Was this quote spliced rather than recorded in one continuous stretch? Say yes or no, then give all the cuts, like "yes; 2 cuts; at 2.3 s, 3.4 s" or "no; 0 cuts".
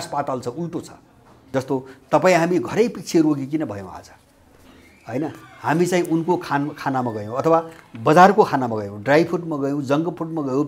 yes; 1 cut; at 1.4 s